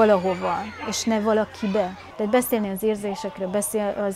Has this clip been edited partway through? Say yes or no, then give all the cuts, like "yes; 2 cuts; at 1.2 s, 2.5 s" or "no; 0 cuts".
yes; 1 cut; at 2.0 s